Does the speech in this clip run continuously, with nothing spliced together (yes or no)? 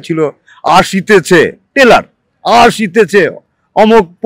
yes